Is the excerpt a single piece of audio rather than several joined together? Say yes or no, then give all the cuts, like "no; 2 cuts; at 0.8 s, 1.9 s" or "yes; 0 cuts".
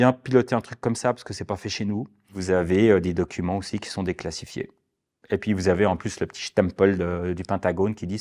no; 1 cut; at 2.3 s